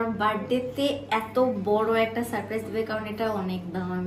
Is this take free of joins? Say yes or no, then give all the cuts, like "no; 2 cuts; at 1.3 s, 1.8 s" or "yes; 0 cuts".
yes; 0 cuts